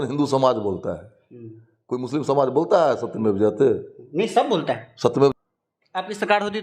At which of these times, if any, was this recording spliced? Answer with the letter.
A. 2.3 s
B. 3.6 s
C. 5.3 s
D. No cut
C